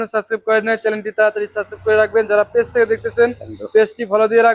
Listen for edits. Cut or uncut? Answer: uncut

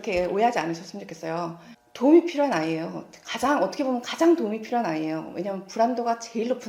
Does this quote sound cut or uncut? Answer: uncut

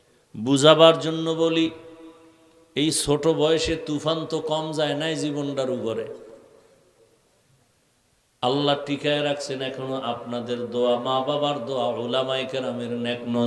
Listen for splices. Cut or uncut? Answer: uncut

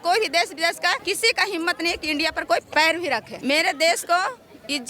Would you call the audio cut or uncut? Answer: cut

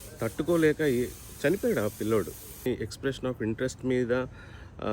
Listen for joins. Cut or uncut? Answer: cut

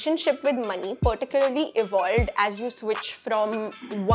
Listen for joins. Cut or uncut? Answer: uncut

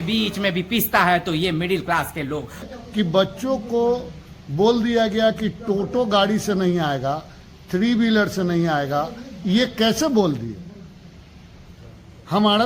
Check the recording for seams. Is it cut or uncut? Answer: cut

